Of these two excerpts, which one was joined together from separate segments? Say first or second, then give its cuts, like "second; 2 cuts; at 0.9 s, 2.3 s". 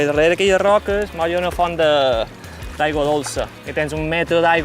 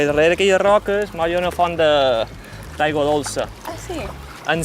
first; 1 cut; at 3.6 s